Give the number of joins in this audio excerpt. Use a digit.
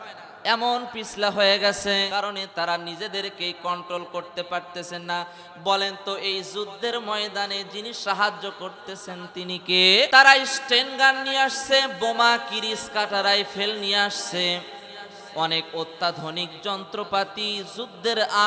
2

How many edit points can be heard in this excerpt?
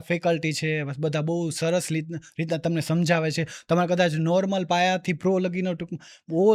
0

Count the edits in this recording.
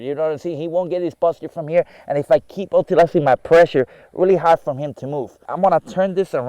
1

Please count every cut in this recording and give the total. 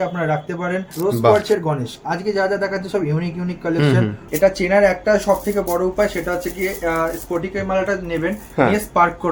2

